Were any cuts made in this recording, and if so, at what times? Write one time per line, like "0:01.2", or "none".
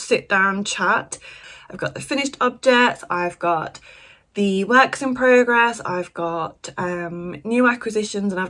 0:01.4

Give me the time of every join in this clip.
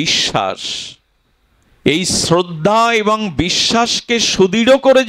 none

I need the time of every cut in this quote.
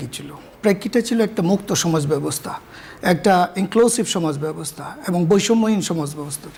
none

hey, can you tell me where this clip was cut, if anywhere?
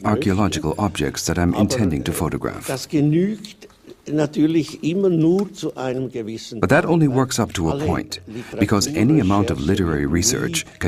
0:07.5

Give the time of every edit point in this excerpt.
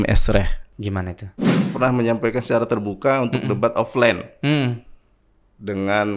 0:01.3

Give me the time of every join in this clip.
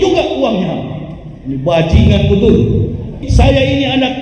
0:03.2

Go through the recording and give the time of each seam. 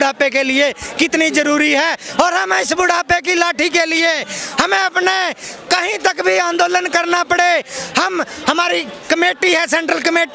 none

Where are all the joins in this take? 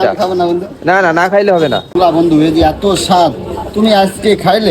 0:01.9

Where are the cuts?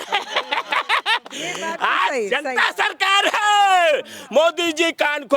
none

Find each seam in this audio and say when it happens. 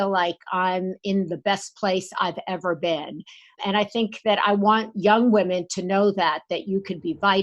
0:03.6

